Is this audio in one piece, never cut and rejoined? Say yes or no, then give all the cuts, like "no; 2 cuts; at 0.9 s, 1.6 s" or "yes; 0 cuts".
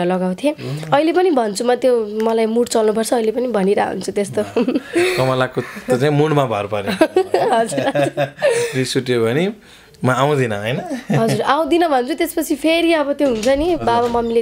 yes; 0 cuts